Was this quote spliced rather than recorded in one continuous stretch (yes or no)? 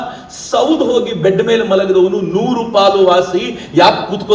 no